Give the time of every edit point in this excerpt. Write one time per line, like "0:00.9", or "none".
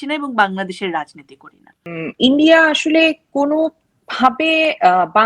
0:01.9